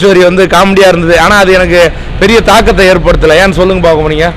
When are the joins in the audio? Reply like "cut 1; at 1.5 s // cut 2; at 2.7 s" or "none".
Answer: none